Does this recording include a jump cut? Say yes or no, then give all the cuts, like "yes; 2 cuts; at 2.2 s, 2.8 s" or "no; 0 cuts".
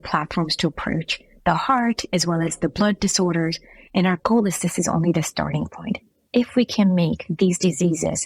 no; 0 cuts